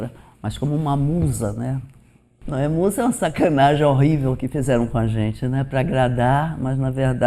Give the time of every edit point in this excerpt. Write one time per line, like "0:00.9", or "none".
0:02.4